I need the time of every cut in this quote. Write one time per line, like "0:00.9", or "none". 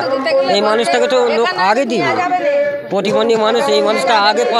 none